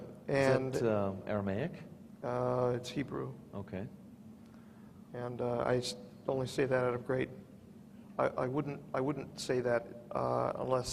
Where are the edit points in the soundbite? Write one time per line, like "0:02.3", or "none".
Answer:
none